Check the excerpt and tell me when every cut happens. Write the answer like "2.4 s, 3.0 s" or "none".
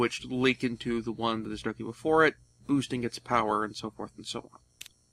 0.9 s